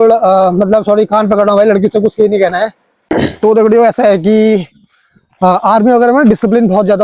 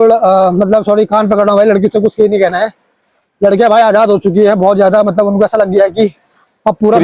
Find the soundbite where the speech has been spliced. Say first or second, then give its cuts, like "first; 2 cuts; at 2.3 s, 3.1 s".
first; 1 cut; at 3.0 s